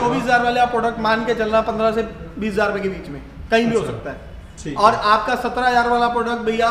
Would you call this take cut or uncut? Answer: uncut